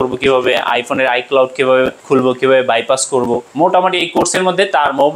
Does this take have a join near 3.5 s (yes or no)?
yes